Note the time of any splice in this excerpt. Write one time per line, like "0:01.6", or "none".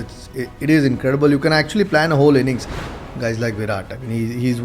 0:02.9